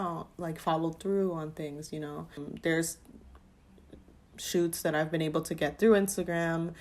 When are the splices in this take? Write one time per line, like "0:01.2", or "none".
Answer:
0:02.4